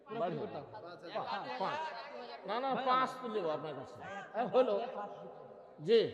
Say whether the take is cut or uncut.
uncut